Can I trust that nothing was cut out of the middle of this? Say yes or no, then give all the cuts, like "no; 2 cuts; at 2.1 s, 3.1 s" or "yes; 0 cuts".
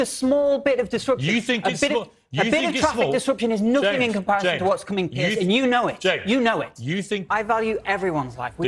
no; 1 cut; at 7.2 s